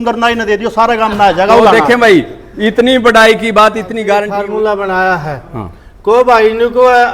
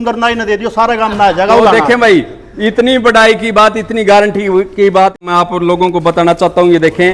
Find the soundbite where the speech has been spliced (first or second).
first